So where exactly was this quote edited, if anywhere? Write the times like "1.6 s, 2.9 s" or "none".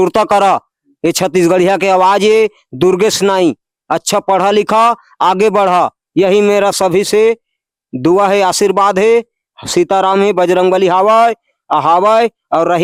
none